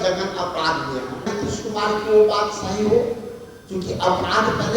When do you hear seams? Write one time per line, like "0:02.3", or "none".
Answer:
0:01.2